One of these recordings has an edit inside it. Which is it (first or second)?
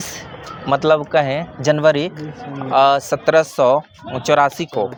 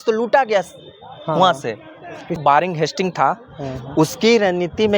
second